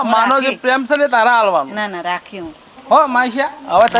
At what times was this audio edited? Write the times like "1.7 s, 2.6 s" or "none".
none